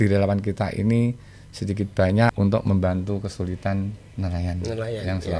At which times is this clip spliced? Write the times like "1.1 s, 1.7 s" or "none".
2.3 s, 4.0 s